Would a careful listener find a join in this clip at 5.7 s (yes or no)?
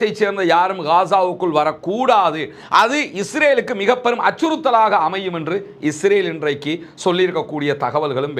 no